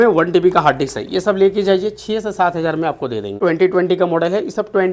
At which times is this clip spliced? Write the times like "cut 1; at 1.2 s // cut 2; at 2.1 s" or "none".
cut 1; at 3.4 s